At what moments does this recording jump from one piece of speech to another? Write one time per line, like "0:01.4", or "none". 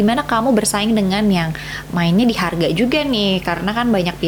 none